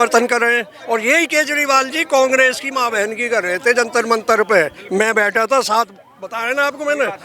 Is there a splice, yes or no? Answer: no